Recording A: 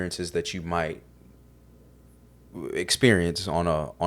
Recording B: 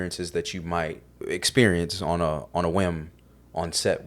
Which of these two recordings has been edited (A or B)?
B